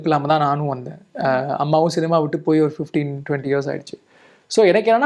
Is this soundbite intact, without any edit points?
yes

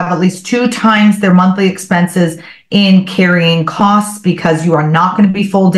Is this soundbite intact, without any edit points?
yes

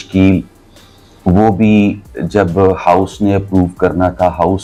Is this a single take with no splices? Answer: yes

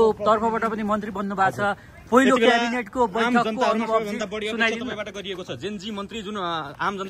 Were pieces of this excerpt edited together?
no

